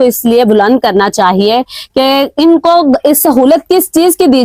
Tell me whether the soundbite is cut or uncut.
uncut